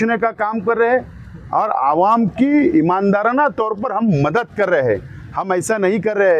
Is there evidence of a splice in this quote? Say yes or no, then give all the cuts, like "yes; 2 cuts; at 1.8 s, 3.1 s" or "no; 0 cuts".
no; 0 cuts